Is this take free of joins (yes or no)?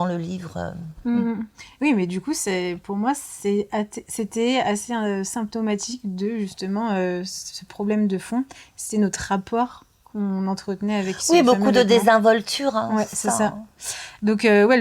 yes